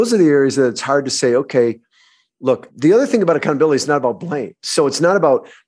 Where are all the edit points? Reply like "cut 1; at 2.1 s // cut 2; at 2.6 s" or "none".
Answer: cut 1; at 2.7 s